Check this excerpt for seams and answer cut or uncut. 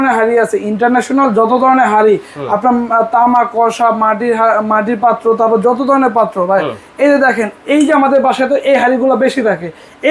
uncut